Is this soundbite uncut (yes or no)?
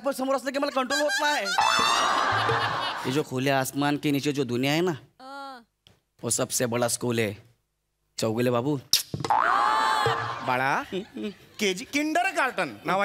no